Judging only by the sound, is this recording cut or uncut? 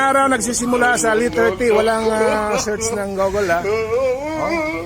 cut